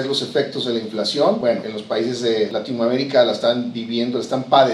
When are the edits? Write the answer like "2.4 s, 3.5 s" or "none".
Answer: 1.5 s, 2.5 s